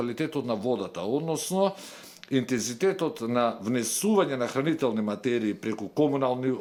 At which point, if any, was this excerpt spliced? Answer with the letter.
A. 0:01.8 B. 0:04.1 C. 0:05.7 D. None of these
D